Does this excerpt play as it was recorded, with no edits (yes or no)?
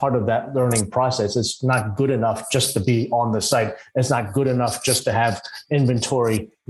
yes